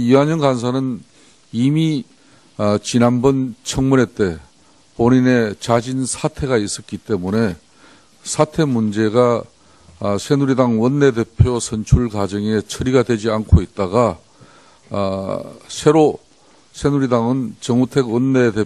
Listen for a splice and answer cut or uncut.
cut